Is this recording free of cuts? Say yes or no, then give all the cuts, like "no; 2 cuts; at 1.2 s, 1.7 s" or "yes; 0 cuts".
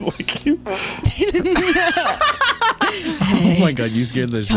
yes; 0 cuts